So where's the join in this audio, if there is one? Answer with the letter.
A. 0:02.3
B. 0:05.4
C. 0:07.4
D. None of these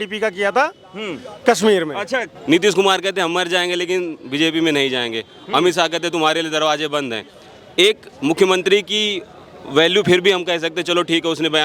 A